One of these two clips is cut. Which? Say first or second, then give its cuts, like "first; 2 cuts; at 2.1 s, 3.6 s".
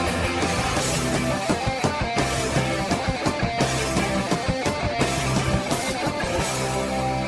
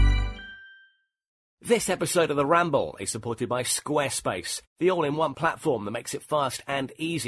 second; 1 cut; at 1.5 s